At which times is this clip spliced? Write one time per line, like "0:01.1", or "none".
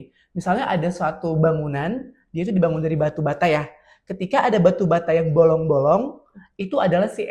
none